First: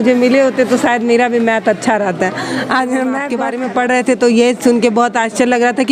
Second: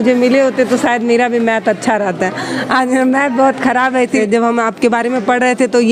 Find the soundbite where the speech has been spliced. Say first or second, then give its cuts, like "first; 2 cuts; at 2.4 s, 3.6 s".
first; 1 cut; at 3.4 s